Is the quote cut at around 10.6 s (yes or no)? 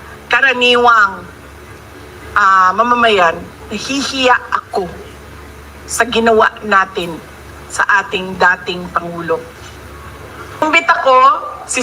yes